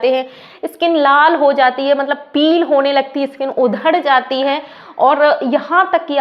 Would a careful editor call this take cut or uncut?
uncut